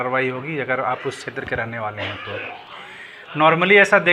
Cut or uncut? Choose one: uncut